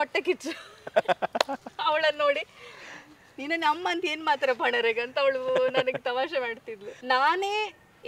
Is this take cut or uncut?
cut